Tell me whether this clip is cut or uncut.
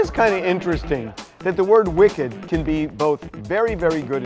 uncut